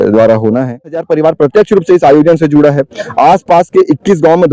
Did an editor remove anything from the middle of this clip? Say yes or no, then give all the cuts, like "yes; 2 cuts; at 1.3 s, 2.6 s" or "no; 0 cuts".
yes; 1 cut; at 1.1 s